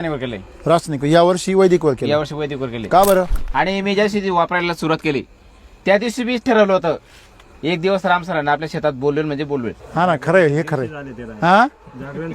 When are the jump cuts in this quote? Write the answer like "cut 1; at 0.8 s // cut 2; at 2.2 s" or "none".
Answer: cut 1; at 3.4 s

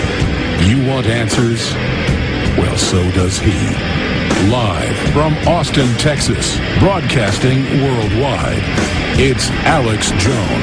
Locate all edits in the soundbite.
cut 1; at 8.7 s

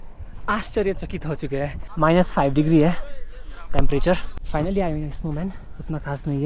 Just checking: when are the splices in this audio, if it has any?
cut 1; at 1.8 s // cut 2; at 4.3 s

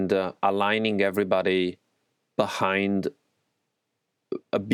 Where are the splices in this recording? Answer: none

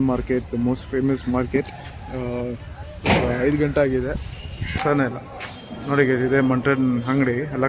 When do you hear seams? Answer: cut 1; at 4.8 s

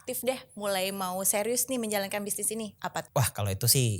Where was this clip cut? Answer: cut 1; at 3.1 s

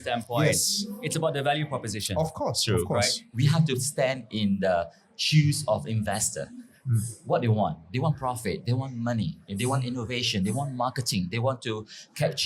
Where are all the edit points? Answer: cut 1; at 3.2 s

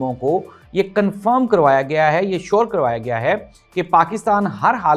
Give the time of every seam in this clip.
none

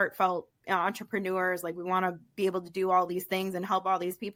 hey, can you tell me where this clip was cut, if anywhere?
none

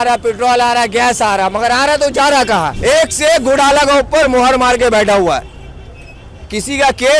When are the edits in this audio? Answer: cut 1; at 2.7 s

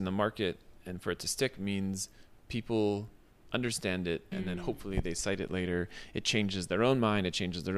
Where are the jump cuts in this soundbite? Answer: none

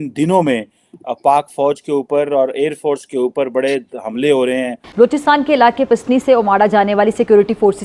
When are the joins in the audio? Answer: cut 1; at 4.8 s

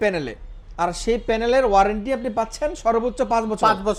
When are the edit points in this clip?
none

